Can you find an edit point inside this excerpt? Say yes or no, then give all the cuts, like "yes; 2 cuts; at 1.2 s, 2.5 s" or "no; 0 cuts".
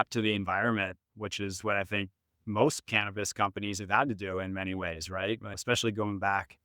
yes; 1 cut; at 5.5 s